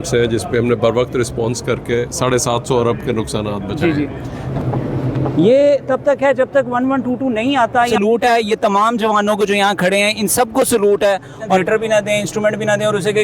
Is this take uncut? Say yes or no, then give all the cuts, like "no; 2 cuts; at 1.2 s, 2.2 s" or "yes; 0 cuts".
no; 3 cuts; at 4.5 s, 7.9 s, 11.6 s